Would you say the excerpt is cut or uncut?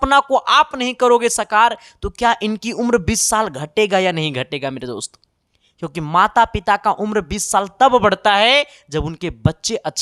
uncut